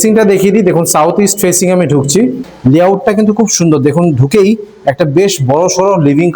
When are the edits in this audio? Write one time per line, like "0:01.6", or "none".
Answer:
0:02.5